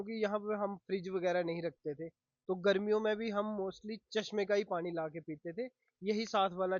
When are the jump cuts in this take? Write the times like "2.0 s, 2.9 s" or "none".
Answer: none